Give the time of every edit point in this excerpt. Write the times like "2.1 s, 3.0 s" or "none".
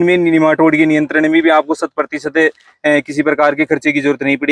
none